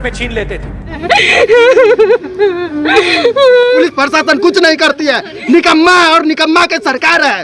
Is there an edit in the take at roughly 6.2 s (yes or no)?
no